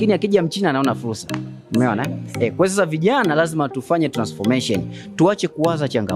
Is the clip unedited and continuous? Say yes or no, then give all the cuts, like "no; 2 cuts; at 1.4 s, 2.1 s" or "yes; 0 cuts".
yes; 0 cuts